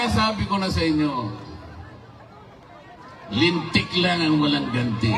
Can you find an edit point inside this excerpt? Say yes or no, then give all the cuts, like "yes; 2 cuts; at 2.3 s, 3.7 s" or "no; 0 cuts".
no; 0 cuts